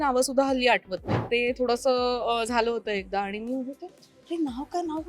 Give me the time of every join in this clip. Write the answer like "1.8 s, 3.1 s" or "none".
1.2 s

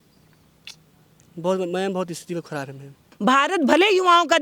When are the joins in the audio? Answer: 3.1 s

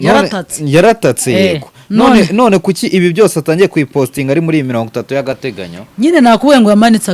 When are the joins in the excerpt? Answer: none

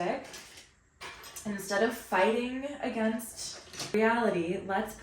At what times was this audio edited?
3.9 s

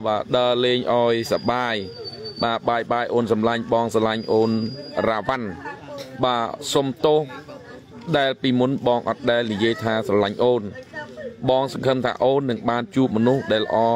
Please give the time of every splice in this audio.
none

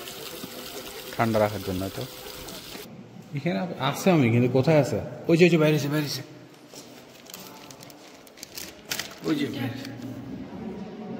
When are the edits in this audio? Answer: 2.8 s

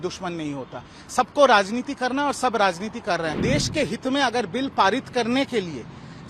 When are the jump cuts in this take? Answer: 3.4 s

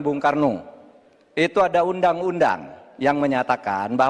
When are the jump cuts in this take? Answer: none

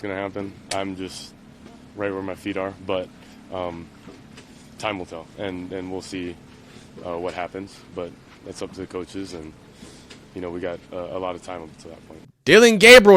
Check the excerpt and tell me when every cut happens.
12.3 s

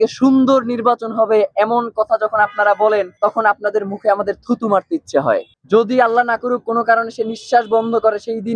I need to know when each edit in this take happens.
3.1 s, 5.5 s

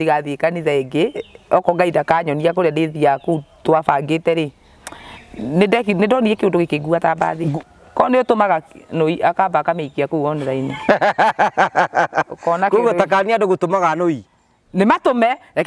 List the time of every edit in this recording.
7.6 s

